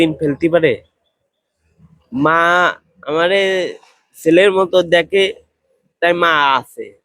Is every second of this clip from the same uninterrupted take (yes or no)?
yes